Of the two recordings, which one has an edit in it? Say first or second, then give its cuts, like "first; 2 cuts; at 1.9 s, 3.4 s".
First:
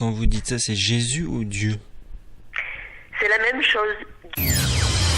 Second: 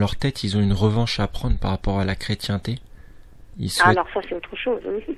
first; 1 cut; at 4.3 s